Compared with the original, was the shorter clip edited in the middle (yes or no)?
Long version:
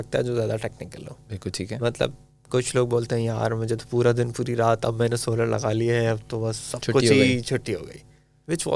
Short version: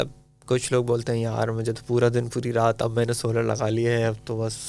no